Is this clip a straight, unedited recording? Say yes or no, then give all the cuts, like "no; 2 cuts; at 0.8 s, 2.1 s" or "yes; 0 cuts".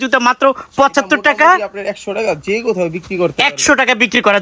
yes; 0 cuts